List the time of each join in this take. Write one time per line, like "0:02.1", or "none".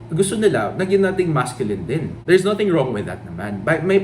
0:02.1